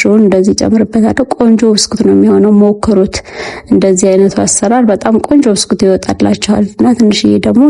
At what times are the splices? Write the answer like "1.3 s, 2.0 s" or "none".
none